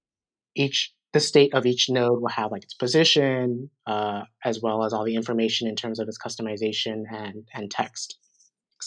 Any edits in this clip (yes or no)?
no